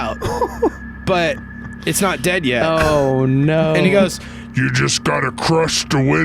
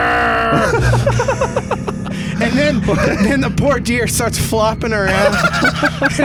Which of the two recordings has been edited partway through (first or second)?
first